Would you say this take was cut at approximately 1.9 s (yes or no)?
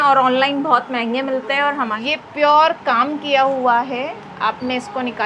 yes